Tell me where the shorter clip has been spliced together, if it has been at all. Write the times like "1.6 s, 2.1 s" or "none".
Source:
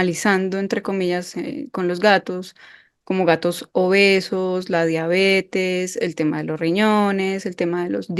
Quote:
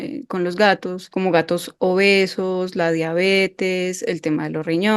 1.0 s